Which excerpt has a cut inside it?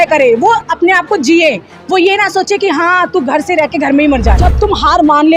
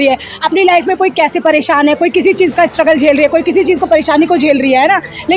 first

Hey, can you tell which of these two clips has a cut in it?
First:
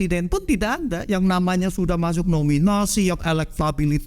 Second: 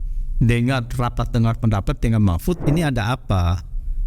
second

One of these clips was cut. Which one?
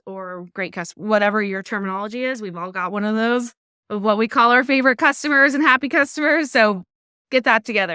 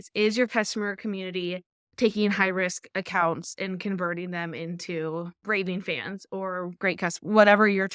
second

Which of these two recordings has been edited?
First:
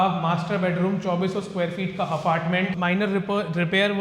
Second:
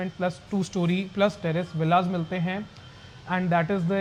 first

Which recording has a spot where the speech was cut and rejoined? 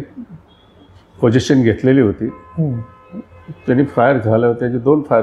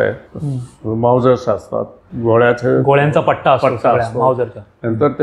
second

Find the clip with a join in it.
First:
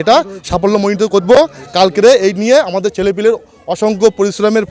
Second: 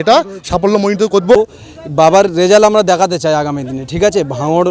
second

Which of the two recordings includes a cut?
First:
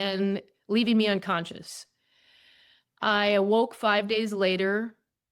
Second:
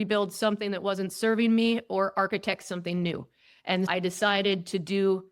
second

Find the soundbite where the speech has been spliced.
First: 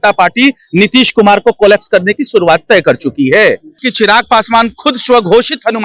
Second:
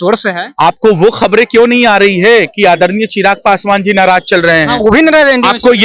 first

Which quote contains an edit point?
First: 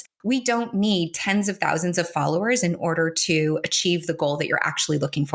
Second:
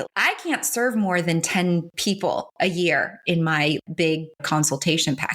second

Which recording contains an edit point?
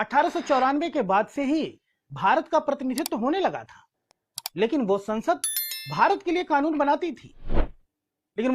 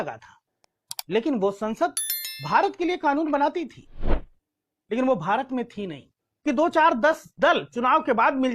second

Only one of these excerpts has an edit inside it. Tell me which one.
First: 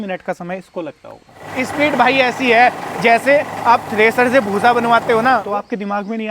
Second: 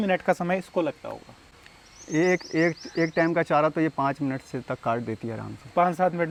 first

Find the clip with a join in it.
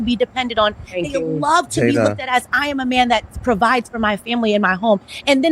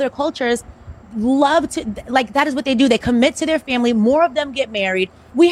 first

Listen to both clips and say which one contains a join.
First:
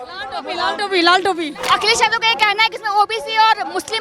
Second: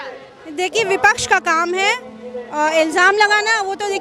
first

